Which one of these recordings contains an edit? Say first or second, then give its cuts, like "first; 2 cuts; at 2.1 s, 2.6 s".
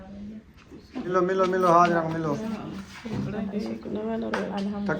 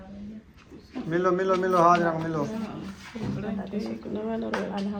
first; 2 cuts; at 1.1 s, 3.5 s